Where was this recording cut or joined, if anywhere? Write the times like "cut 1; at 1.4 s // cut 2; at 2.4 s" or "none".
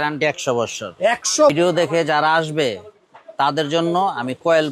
cut 1; at 1.5 s